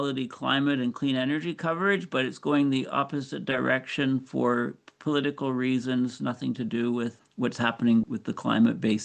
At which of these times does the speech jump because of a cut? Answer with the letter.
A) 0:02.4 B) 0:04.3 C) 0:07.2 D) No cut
D